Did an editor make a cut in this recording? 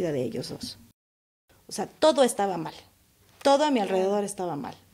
yes; 1 cut; at 1.0 s

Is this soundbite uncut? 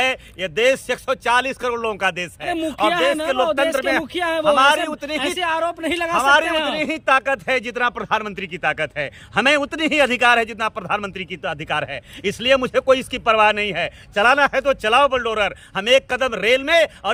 yes; 0 cuts

